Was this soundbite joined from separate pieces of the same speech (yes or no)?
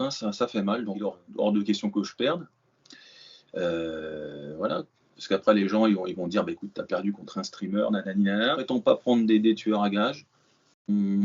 yes